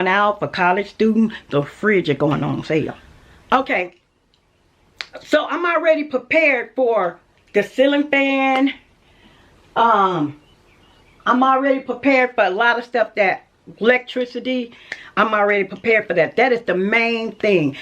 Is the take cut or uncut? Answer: cut